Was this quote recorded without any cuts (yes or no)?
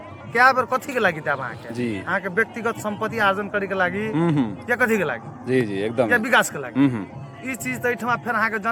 yes